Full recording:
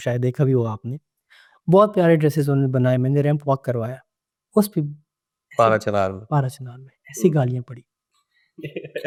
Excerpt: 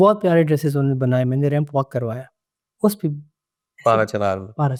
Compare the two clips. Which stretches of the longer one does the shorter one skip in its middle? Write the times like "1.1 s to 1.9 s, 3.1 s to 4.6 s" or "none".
none